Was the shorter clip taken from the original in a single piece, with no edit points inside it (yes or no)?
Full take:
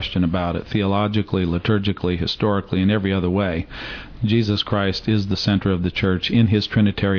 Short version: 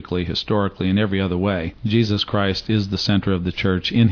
no